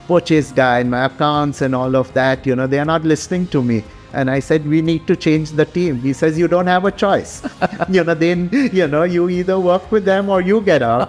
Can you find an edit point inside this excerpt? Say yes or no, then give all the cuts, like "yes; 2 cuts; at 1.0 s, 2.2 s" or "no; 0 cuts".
no; 0 cuts